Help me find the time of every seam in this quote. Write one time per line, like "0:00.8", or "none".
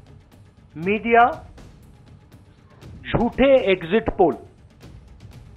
0:04.6